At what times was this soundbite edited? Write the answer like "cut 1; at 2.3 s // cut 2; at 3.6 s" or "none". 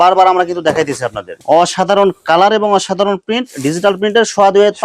cut 1; at 1.3 s